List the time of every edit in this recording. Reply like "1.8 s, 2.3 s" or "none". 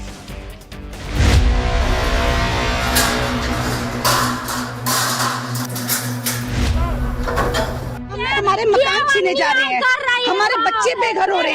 1.0 s